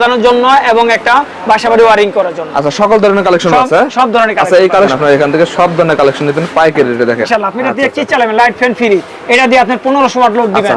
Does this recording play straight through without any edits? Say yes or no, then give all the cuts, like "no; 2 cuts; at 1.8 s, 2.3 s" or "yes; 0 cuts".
no; 2 cuts; at 4.9 s, 7.2 s